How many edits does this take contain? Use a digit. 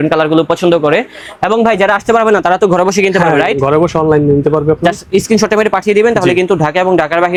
0